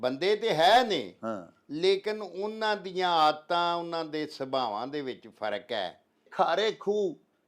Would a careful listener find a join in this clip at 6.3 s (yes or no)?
yes